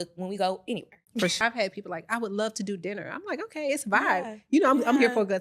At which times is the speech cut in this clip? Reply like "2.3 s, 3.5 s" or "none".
1.4 s